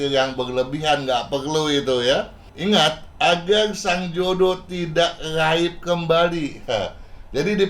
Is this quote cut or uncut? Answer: cut